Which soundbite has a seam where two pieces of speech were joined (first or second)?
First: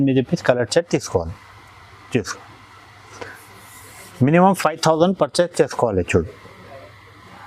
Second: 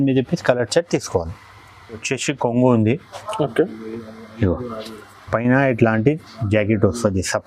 second